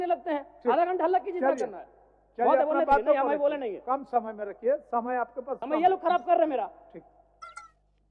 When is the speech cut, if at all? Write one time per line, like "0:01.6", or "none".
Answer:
none